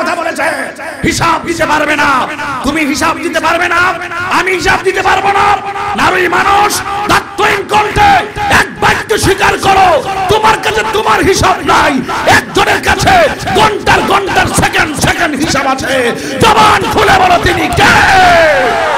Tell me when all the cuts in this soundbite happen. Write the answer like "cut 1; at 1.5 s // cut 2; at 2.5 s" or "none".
none